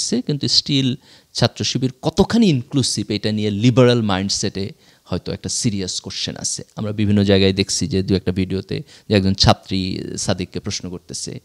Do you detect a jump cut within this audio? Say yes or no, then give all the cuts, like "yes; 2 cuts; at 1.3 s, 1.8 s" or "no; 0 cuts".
no; 0 cuts